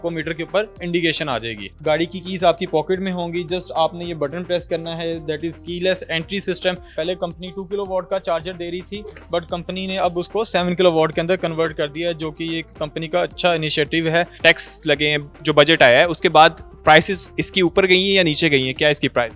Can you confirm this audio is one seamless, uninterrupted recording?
no; 3 cuts; at 1.8 s, 6.9 s, 14.3 s

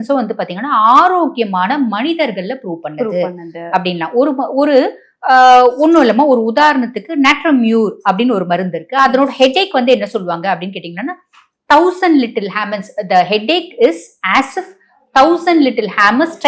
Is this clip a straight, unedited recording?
yes; 0 cuts

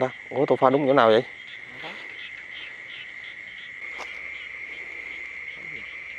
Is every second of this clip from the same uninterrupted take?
no; 1 cut; at 3.8 s

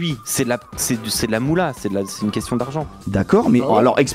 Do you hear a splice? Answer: no; 0 cuts

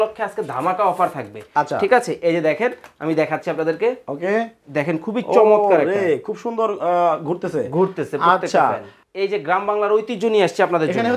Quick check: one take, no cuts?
no; 1 cut; at 8.9 s

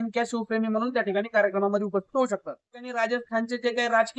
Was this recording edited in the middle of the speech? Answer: yes; 1 cut; at 2.8 s

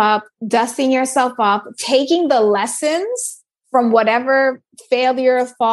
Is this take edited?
no; 0 cuts

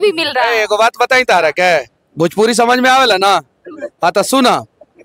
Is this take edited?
no; 0 cuts

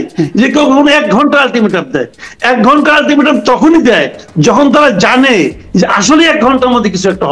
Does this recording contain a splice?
no; 0 cuts

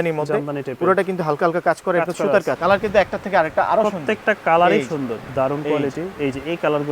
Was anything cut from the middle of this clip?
yes; 2 cuts; at 2.6 s, 5.3 s

